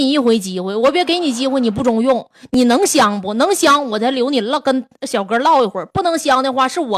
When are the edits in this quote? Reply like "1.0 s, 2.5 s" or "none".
none